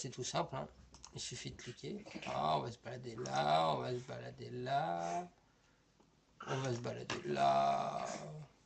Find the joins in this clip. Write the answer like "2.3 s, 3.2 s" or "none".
3.4 s